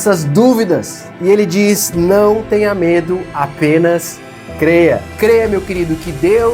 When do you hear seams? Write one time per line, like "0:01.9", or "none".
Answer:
0:01.1
0:05.1

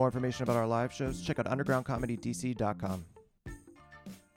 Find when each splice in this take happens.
0:03.2

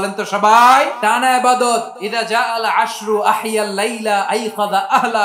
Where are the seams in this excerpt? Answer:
0:00.9
0:02.0

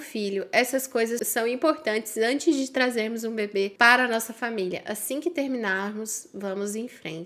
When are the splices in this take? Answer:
0:01.2
0:03.7

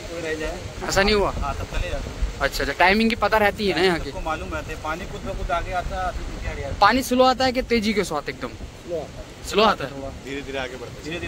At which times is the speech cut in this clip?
none

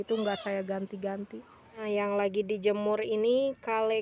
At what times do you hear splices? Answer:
0:01.8

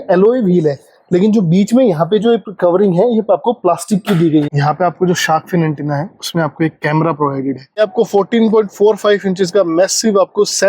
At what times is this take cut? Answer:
0:04.5
0:07.8

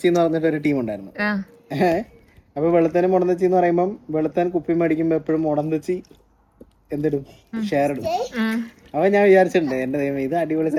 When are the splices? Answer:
none

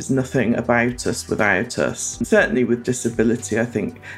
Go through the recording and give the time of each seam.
0:02.2

